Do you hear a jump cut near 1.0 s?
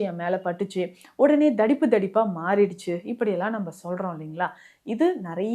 no; 0 cuts

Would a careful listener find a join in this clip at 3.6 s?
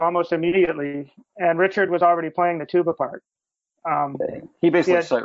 no; 0 cuts

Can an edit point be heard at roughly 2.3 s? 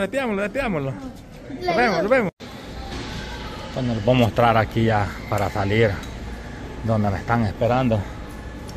yes; 1 cut; at 2.3 s

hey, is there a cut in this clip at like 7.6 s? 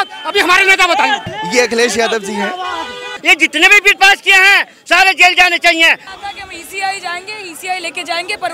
no; 3 cuts; at 1.3 s, 3.1 s, 6.1 s

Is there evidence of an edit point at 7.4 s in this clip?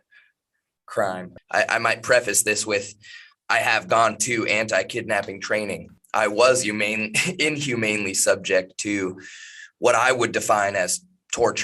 no; 2 cuts; at 1.3 s, 5.9 s

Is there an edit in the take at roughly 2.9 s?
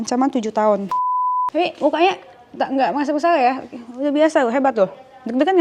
no; 1 cut; at 1.5 s

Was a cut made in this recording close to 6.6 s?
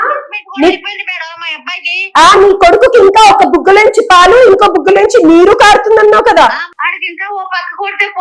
yes; 1 cut; at 6.6 s

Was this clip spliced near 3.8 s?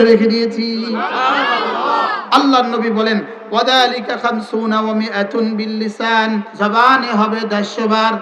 no; 2 cuts; at 2.1 s, 6.5 s

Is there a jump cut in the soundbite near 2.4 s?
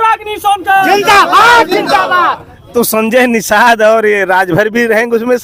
no; 0 cuts

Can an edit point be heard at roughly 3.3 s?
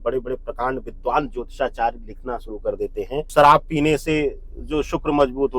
yes; 1 cut; at 3.3 s

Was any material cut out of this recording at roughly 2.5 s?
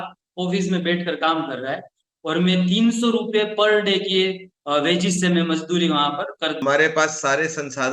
no; 1 cut; at 6.6 s

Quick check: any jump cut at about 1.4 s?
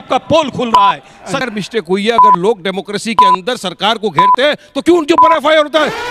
yes; 1 cut; at 1.4 s

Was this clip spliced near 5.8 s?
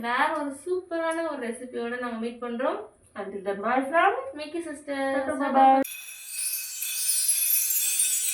yes; 1 cut; at 5.8 s

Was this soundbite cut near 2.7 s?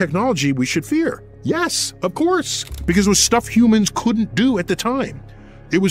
yes; 1 cut; at 2.7 s

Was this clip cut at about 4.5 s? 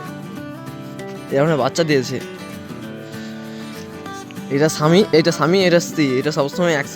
yes; 2 cuts; at 2.2 s, 4.5 s

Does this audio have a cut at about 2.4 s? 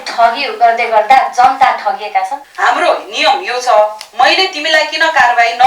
yes; 1 cut; at 2.4 s

